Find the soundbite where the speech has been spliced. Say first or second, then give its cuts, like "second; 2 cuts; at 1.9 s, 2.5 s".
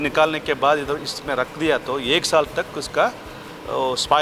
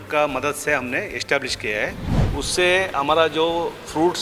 second; 1 cut; at 2.1 s